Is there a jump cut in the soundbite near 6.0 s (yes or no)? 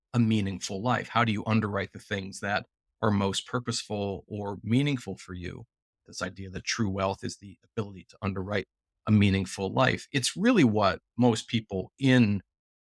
yes